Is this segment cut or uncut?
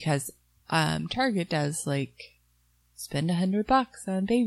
uncut